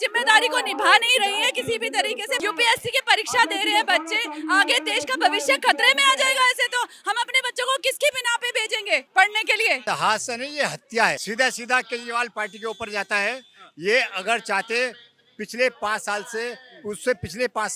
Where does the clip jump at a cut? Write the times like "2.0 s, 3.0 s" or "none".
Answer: none